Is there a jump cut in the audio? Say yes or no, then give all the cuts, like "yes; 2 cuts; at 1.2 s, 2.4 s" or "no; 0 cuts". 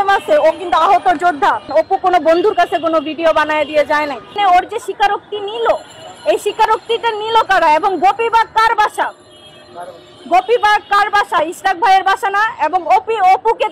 yes; 2 cuts; at 1.7 s, 4.3 s